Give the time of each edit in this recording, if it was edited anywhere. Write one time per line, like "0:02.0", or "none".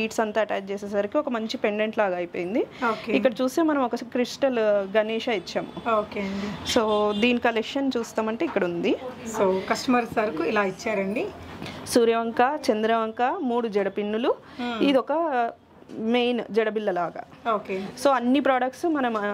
none